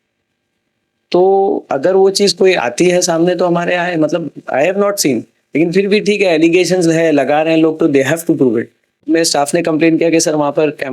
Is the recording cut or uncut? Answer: cut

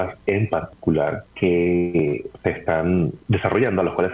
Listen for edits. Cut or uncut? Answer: cut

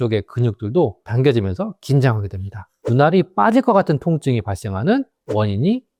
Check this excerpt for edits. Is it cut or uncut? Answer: uncut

